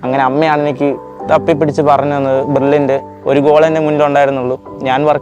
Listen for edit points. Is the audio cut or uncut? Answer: cut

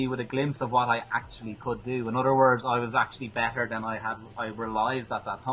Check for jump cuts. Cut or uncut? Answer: uncut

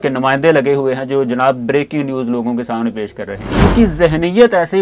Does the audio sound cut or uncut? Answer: cut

